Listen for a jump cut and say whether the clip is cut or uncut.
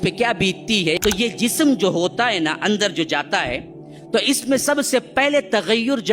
cut